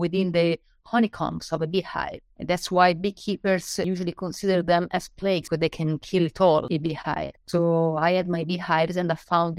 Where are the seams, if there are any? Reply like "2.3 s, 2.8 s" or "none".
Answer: 3.9 s, 5.4 s, 6.7 s